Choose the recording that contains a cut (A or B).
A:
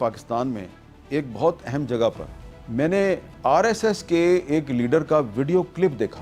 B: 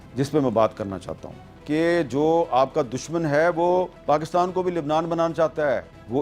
B